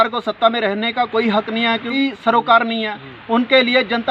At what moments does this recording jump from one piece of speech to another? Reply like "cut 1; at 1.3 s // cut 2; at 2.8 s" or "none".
cut 1; at 1.9 s